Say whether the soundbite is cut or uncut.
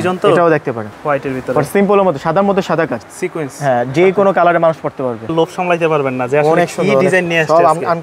cut